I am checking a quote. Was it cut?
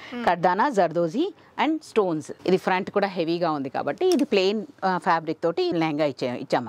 yes; 2 cuts; at 2.3 s, 5.7 s

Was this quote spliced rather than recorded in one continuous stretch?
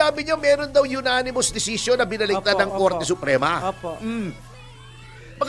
no; 0 cuts

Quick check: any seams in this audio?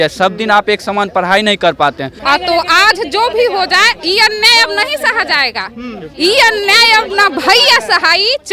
yes; 1 cut; at 2.3 s

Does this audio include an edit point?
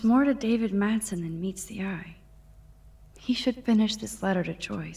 no; 0 cuts

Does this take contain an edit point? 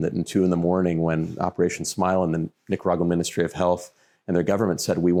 no; 0 cuts

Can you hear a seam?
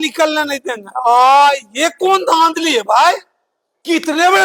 no; 0 cuts

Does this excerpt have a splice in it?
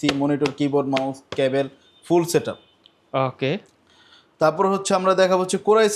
no; 0 cuts

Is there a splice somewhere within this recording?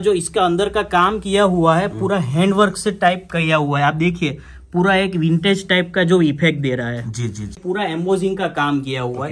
yes; 1 cut; at 7.6 s

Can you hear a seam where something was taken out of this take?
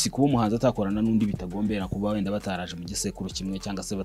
no; 0 cuts

